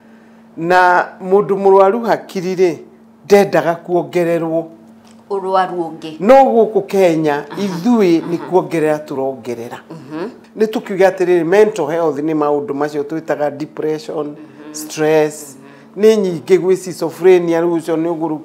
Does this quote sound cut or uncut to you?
cut